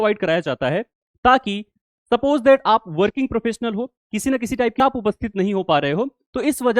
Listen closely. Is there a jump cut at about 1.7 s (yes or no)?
no